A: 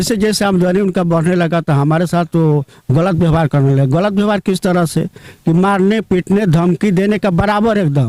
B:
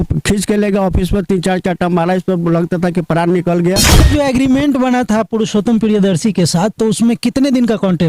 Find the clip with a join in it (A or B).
B